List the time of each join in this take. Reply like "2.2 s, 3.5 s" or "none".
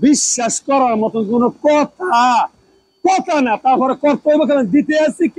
none